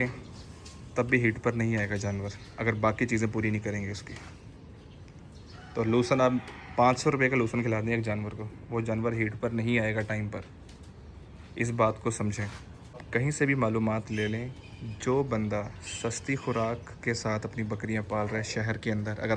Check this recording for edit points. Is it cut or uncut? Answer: uncut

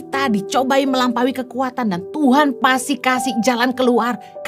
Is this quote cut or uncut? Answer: uncut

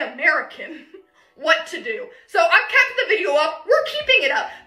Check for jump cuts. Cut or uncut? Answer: cut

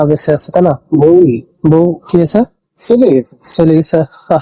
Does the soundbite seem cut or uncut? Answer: uncut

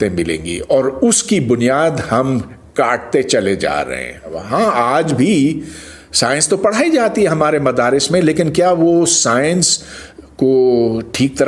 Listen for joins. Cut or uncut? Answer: cut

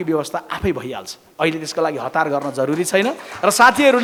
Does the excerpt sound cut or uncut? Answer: uncut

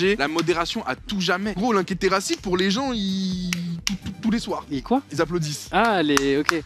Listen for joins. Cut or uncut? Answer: cut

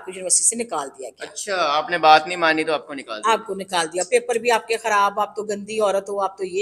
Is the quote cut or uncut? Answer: uncut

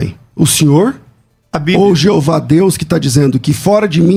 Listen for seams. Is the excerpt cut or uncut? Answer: uncut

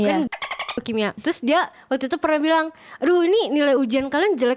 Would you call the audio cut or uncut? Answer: cut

